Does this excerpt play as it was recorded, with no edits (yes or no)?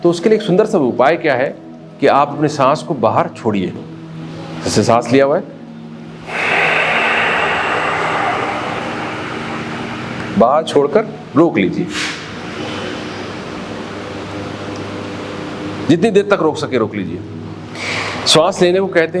yes